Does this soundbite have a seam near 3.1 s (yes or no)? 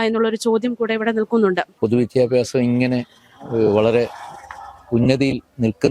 no